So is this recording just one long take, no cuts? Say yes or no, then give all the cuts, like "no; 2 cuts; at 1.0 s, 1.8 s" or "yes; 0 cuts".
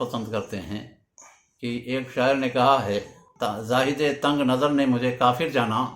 no; 1 cut; at 3.2 s